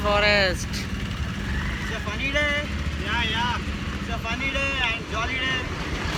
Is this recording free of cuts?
yes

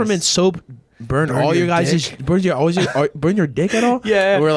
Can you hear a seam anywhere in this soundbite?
no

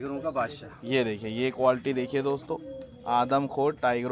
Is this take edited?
no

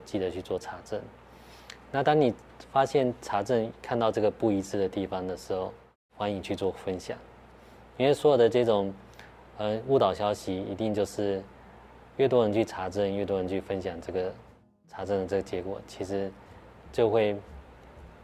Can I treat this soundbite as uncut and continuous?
yes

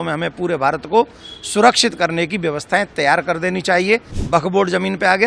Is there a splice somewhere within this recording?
yes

